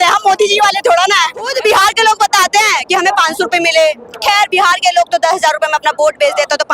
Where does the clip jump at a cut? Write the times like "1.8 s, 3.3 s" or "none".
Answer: 1.5 s